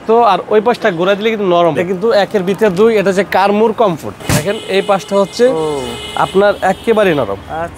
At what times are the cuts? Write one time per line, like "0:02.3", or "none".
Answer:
0:01.8
0:04.1